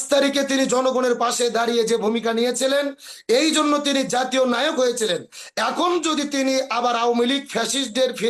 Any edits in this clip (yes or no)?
no